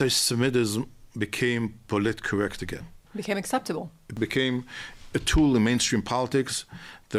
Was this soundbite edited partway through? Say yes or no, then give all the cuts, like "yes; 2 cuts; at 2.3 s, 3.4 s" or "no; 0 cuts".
yes; 2 cuts; at 3.0 s, 4.1 s